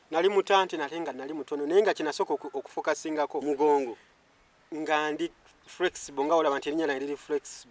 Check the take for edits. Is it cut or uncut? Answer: uncut